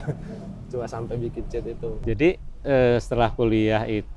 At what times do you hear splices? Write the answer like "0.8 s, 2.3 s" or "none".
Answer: 2.0 s